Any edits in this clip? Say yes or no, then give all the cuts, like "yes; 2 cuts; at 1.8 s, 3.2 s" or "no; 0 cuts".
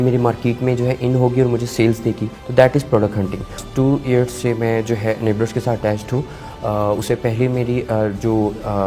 yes; 2 cuts; at 2.3 s, 3.6 s